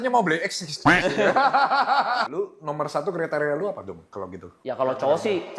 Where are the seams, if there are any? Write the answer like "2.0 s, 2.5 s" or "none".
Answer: 2.3 s